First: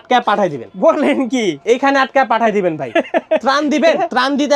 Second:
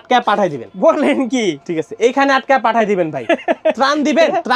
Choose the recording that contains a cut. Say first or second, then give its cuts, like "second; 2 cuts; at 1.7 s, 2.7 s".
first; 1 cut; at 1.6 s